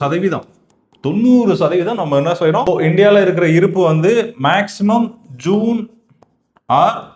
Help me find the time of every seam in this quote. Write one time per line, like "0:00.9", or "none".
0:02.7